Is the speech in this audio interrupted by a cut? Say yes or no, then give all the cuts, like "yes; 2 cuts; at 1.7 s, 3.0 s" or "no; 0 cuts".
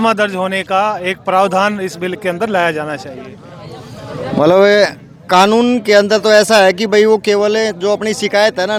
no; 0 cuts